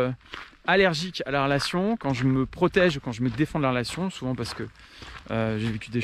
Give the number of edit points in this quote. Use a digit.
0